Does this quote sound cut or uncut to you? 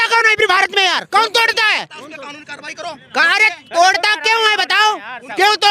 uncut